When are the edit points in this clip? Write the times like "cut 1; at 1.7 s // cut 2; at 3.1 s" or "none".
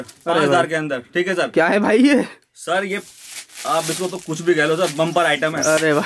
none

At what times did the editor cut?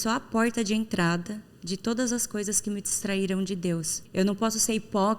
cut 1; at 4.0 s

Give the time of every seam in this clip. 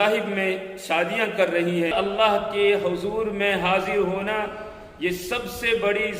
cut 1; at 1.9 s

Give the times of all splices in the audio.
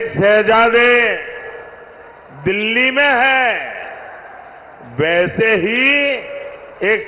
none

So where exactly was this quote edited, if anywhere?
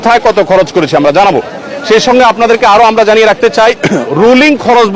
none

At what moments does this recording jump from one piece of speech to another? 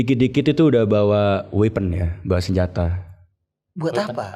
none

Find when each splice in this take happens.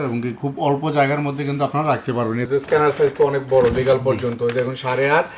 cut 1; at 2.5 s

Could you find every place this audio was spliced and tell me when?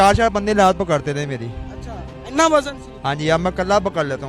none

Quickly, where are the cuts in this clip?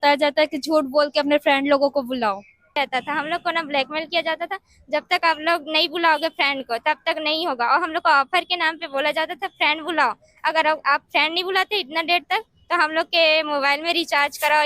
cut 1; at 2.8 s

